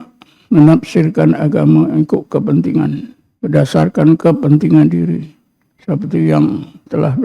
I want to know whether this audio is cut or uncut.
cut